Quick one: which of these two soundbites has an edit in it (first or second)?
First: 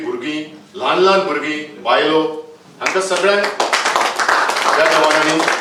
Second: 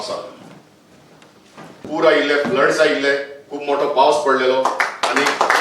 second